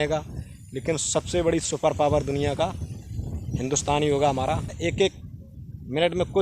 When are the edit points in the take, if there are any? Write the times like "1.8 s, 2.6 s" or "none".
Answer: 4.7 s